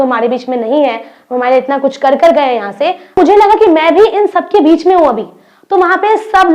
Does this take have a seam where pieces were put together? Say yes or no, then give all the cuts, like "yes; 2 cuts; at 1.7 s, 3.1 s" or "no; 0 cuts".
yes; 1 cut; at 3.2 s